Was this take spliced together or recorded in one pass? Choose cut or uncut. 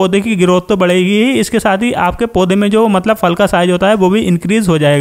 uncut